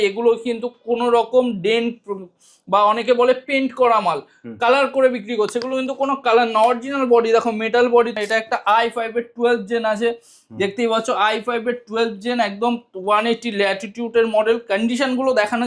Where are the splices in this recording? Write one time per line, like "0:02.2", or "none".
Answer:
0:08.1